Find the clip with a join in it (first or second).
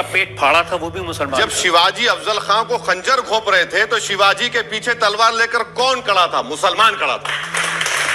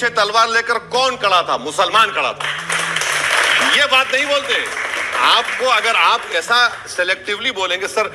first